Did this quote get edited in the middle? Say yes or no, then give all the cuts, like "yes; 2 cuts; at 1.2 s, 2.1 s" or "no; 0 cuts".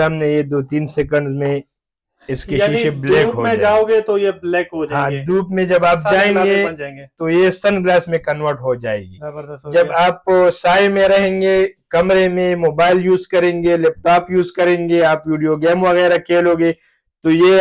no; 0 cuts